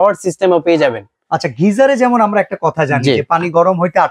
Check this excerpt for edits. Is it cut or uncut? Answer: uncut